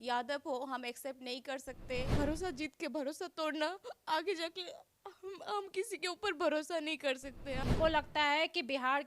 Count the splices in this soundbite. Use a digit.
2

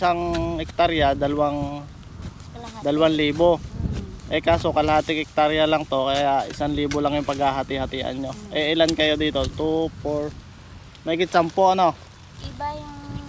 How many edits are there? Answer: 0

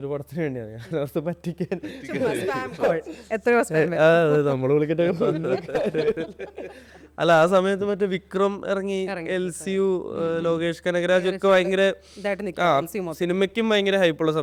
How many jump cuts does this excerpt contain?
0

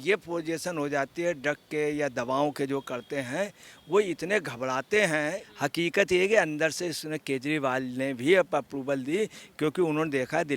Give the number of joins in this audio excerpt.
1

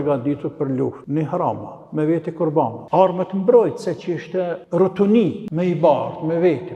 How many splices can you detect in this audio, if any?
4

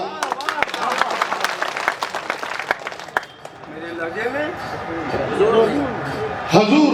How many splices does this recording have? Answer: 0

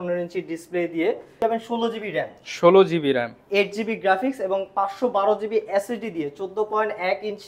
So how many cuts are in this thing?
1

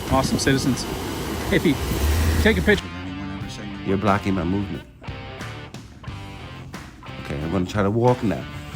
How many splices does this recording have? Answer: 1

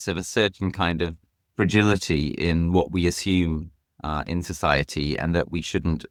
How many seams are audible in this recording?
0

